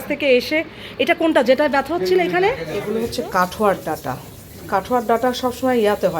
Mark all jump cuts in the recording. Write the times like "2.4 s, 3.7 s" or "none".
2.7 s